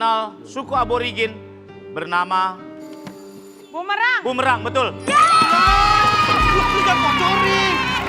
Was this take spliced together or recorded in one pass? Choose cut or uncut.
uncut